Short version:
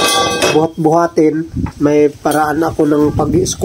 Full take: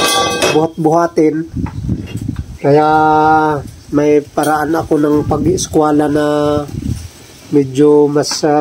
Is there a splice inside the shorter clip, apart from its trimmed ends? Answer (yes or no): yes